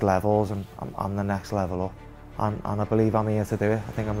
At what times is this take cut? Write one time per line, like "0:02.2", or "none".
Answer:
0:02.0